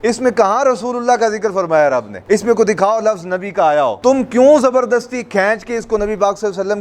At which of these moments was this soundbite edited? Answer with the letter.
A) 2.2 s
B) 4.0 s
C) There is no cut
B